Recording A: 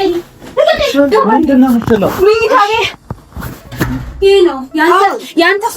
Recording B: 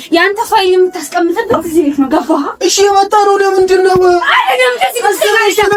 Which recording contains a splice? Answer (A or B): A